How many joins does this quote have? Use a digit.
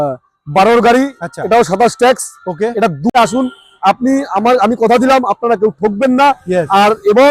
1